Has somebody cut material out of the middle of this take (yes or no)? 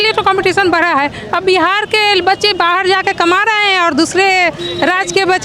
no